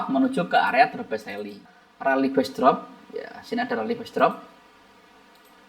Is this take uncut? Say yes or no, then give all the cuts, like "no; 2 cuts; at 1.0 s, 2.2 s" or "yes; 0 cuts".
no; 1 cut; at 1.6 s